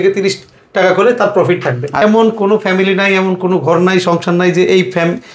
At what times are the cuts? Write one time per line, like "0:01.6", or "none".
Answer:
0:02.0